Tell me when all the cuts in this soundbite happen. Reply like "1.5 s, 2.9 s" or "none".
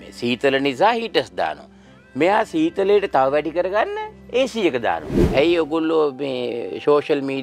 5.1 s